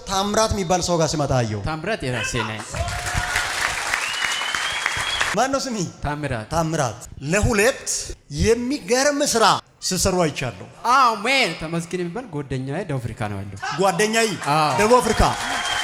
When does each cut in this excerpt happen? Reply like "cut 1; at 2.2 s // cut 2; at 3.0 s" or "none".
none